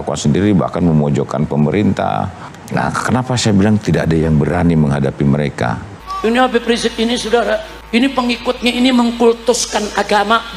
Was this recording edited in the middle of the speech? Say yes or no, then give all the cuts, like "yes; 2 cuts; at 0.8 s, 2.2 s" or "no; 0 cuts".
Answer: yes; 3 cuts; at 2.6 s, 5.5 s, 7.7 s